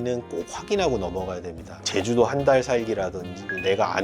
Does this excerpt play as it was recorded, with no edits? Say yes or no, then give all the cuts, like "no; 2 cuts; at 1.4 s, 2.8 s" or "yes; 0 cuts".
no; 1 cut; at 1.8 s